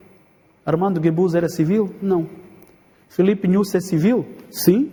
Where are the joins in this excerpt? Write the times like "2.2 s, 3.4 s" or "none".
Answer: none